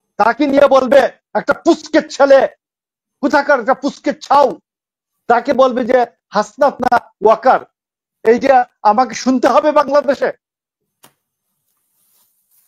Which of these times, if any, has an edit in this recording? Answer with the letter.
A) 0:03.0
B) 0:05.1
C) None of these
C